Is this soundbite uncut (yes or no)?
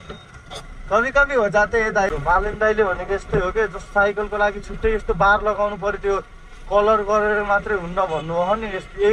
no